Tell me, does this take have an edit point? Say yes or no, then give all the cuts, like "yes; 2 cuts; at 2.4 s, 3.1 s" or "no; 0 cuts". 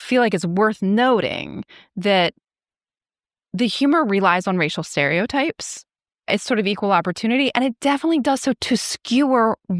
yes; 1 cut; at 6.3 s